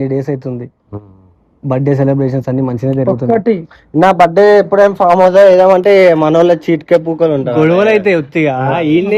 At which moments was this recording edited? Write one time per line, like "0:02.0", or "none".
none